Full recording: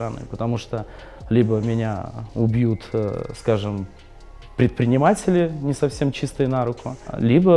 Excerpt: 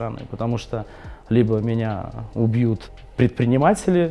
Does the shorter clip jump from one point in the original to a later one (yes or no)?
yes